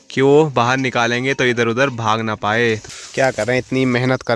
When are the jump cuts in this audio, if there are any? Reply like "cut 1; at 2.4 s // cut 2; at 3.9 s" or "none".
cut 1; at 2.9 s

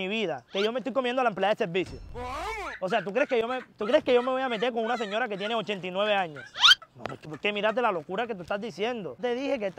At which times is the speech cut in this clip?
none

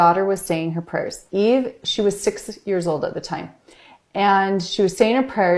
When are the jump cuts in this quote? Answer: none

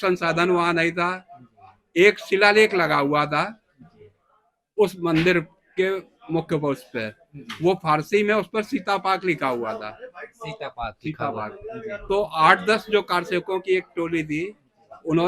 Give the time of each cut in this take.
none

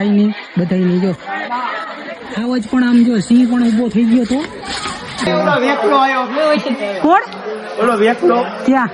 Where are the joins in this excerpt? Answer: cut 1; at 5.2 s

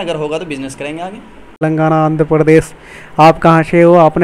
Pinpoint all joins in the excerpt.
cut 1; at 1.6 s

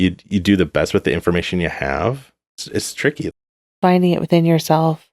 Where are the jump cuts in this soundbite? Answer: cut 1; at 3.5 s

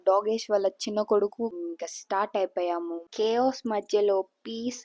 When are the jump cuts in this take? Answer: cut 1; at 1.5 s // cut 2; at 3.0 s

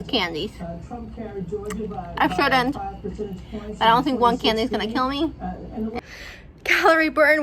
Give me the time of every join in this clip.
cut 1; at 5.9 s

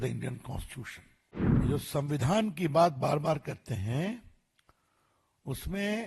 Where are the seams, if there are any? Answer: cut 1; at 1.6 s

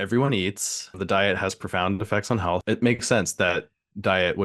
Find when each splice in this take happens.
cut 1; at 1.0 s // cut 2; at 2.6 s

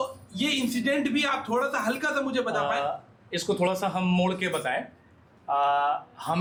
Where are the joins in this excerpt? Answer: none

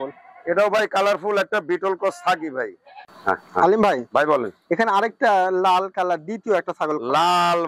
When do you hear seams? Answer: cut 1; at 3.0 s

